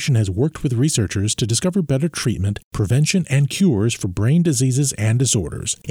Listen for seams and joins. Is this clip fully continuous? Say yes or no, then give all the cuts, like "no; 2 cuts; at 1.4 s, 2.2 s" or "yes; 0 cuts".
yes; 0 cuts